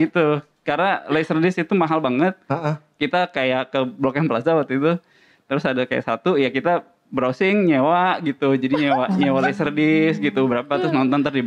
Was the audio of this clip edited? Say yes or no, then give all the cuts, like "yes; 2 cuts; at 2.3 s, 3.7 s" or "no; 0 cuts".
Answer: no; 0 cuts